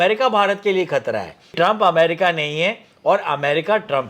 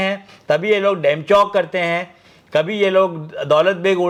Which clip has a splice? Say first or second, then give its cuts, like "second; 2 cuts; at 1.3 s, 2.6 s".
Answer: first; 1 cut; at 1.5 s